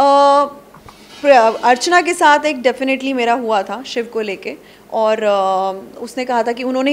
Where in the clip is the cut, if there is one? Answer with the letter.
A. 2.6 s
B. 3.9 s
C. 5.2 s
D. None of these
D